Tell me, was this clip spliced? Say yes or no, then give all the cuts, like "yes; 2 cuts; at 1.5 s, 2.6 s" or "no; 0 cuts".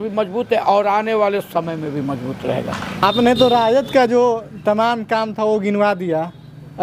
no; 0 cuts